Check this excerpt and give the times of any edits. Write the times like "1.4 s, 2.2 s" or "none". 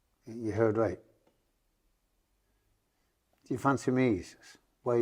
none